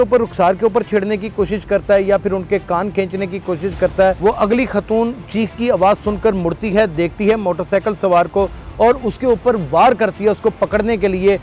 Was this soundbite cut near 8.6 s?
no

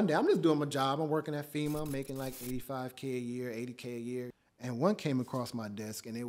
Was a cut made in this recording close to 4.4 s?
yes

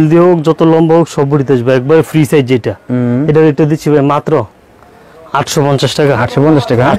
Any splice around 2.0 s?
no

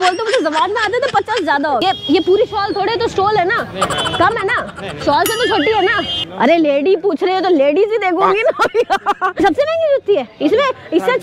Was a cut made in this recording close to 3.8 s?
no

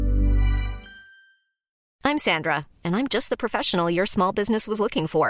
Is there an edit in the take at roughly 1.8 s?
yes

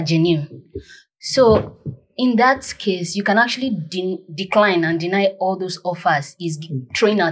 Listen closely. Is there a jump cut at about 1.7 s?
no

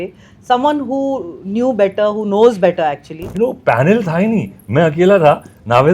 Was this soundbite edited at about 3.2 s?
yes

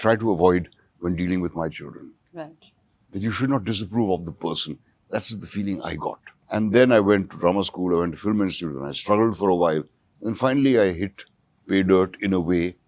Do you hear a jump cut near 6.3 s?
yes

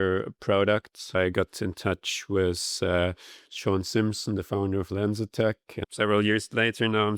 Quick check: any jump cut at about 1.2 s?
yes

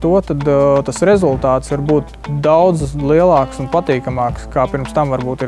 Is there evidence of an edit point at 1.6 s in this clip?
yes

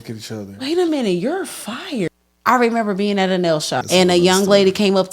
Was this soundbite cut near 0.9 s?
no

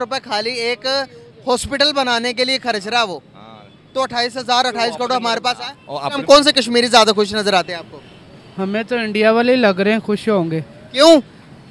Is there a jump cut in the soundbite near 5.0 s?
no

